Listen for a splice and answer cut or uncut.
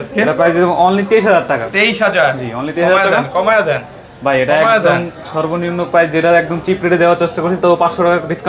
uncut